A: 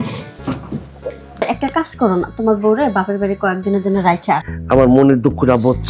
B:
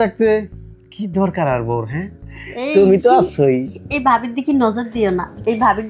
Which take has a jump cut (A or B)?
A